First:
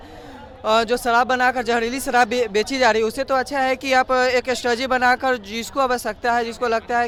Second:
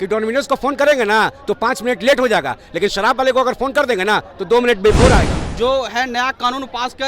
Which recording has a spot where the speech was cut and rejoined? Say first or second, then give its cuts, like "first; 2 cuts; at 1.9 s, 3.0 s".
second; 1 cut; at 5.4 s